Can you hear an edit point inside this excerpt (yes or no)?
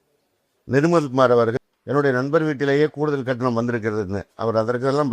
yes